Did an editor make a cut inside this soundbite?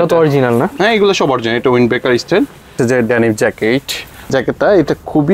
yes; 2 cuts; at 2.7 s, 4.3 s

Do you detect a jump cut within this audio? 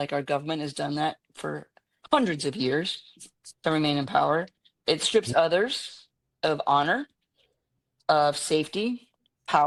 no; 0 cuts

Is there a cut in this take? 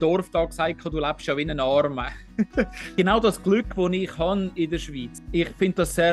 yes; 1 cut; at 2.9 s

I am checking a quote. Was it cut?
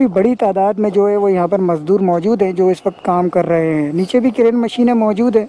no; 0 cuts

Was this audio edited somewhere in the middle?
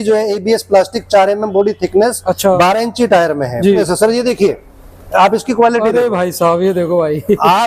yes; 1 cut; at 3.8 s

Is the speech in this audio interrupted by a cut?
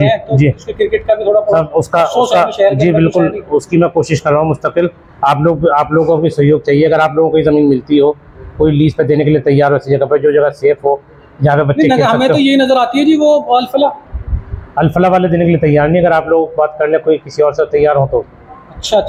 no; 0 cuts

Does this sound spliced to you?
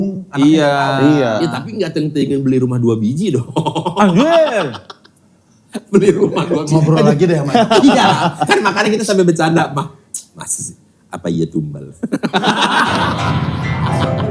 no; 0 cuts

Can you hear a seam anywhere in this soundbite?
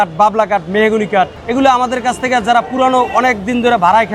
yes; 1 cut; at 1.4 s

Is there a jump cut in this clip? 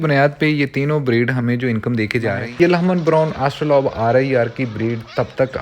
yes; 1 cut; at 2.4 s

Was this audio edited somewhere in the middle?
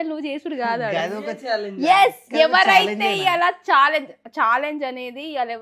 no; 0 cuts

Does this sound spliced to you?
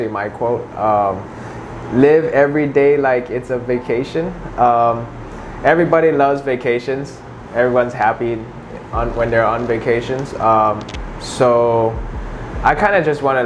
no; 0 cuts

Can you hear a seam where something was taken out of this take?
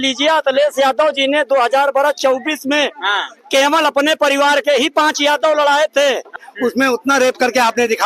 yes; 1 cut; at 6.5 s

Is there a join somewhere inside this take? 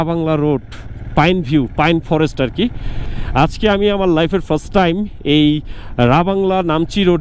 yes; 1 cut; at 3.2 s

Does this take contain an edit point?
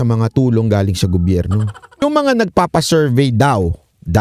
yes; 1 cut; at 2.0 s

